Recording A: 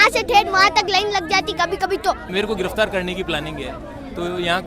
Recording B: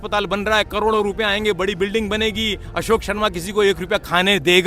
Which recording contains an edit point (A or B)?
A